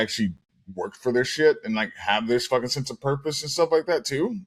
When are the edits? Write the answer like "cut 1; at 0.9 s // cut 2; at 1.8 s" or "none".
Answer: none